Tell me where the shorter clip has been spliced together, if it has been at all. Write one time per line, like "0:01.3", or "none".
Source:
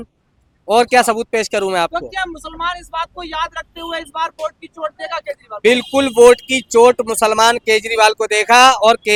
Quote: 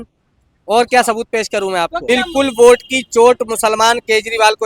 0:02.1